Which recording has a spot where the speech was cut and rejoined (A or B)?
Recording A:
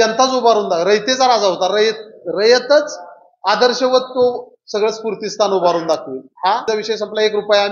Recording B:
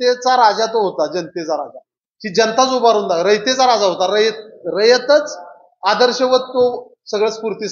A